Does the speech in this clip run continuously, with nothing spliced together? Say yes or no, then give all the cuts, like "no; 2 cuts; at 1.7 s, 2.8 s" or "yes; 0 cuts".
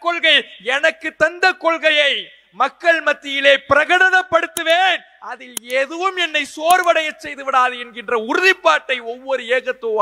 yes; 0 cuts